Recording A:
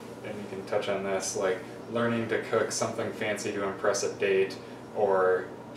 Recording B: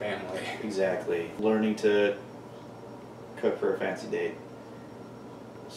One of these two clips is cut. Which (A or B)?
B